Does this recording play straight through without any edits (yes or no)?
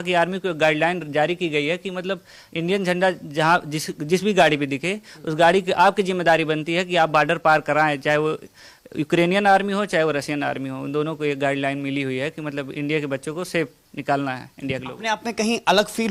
yes